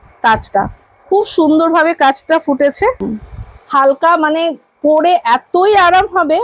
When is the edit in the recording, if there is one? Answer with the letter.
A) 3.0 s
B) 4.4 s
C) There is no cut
A